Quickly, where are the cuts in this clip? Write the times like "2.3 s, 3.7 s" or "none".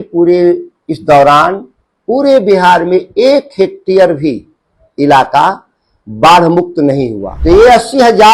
7.2 s

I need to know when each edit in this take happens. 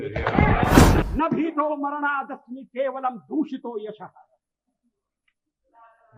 1.1 s

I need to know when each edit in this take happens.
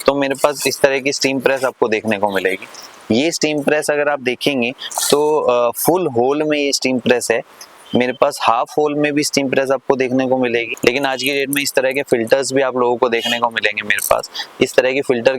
10.7 s

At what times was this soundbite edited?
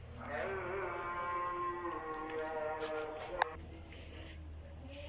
3.5 s

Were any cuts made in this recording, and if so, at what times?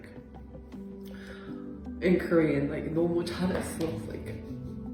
none

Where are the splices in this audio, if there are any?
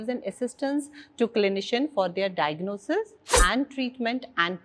none

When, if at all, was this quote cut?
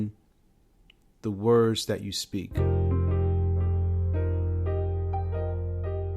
2.5 s

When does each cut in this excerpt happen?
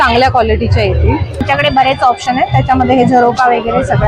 1.4 s

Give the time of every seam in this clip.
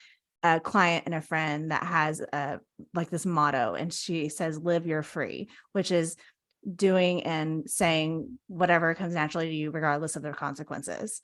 none

